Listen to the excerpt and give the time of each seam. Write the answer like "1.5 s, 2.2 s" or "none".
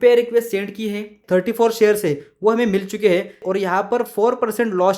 1.2 s, 3.4 s